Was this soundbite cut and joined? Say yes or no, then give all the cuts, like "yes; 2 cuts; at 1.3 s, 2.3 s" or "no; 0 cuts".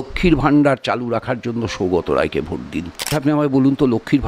yes; 1 cut; at 3.1 s